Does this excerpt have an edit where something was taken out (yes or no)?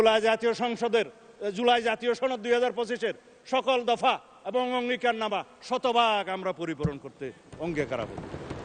no